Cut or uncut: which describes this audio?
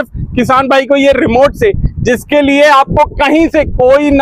uncut